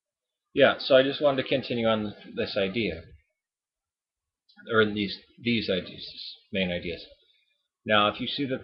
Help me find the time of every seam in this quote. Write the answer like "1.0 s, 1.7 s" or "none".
2.8 s

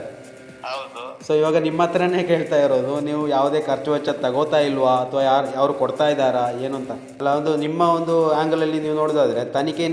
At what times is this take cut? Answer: 7.0 s

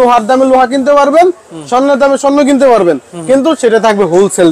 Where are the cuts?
none

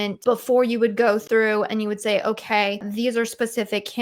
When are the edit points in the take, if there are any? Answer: 1.2 s

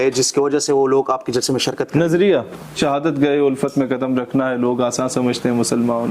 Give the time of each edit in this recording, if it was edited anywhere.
2.8 s

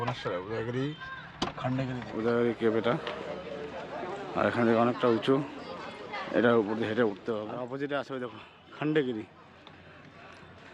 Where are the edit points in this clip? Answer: 2.1 s, 7.2 s

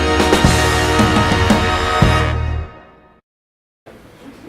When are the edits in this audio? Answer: 1.1 s

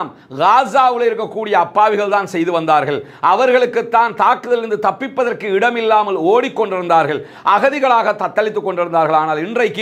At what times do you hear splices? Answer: none

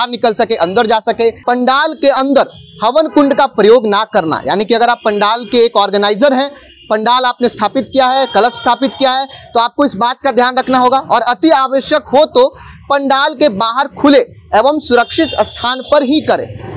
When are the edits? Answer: 1.4 s

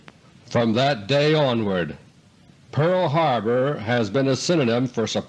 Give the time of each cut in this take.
2.7 s

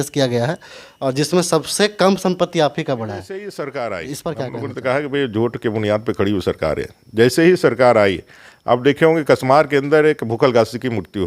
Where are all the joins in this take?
3.4 s

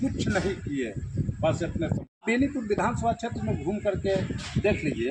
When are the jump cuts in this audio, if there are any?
2.2 s

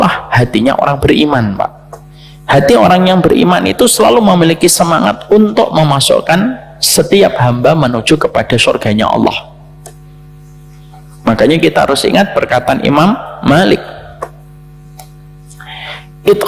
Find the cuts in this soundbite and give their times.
none

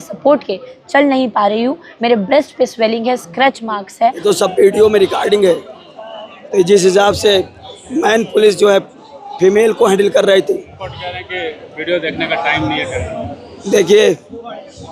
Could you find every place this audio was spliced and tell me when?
4.2 s, 10.8 s

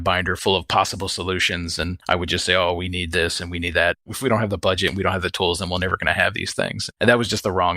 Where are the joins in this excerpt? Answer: 6.9 s

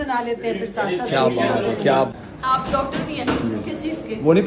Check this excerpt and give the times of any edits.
2.1 s

